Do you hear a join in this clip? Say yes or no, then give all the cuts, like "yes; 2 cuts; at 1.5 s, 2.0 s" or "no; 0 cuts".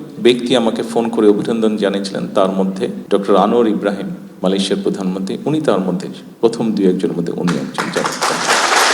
yes; 2 cuts; at 3.0 s, 4.2 s